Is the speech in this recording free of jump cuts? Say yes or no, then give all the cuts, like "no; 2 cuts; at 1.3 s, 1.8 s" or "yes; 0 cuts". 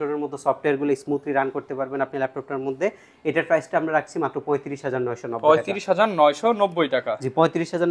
yes; 0 cuts